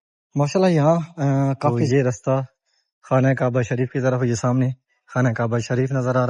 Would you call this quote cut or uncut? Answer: cut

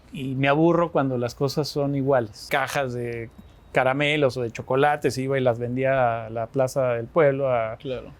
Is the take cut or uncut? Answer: cut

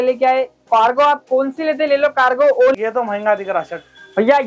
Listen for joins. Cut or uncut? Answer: cut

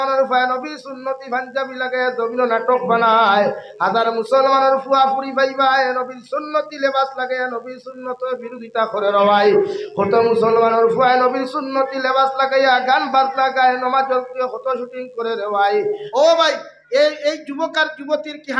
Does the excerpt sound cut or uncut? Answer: cut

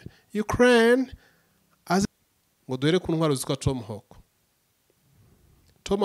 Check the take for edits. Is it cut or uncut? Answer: cut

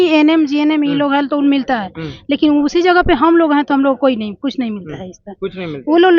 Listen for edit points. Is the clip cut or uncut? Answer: uncut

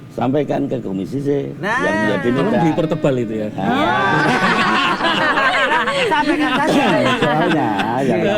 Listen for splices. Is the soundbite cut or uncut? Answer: uncut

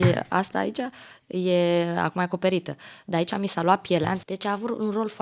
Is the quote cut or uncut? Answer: cut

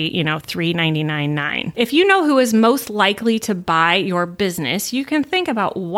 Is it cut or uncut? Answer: cut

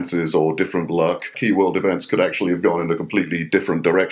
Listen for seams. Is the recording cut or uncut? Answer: cut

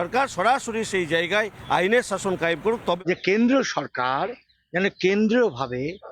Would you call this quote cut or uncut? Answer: cut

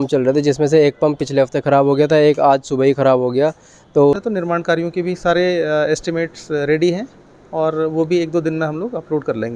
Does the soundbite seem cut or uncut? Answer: cut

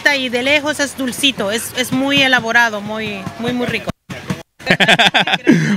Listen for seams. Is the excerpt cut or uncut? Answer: cut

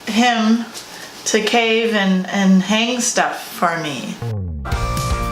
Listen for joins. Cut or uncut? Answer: cut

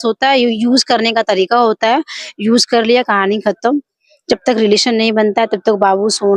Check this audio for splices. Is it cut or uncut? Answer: uncut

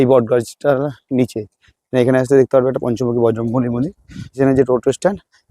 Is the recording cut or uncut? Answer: cut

